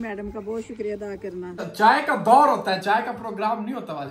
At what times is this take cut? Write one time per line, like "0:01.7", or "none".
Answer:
0:01.6